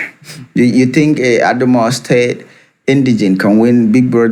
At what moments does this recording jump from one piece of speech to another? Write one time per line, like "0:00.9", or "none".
none